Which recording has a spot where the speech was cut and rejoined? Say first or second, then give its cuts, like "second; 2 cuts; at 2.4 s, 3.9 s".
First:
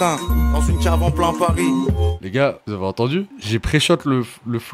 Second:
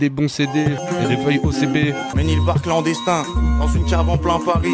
second; 2 cuts; at 0.8 s, 2.1 s